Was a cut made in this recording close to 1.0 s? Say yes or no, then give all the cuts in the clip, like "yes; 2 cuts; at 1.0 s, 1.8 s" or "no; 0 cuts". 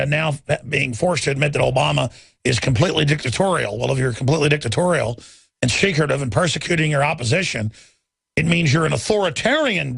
yes; 1 cut; at 1.0 s